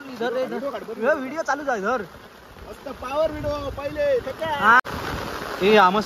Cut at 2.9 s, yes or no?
no